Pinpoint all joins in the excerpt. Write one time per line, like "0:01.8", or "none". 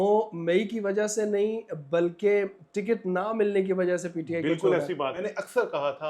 0:05.2